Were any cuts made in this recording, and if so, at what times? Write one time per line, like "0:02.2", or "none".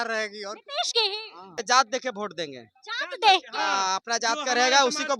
0:01.6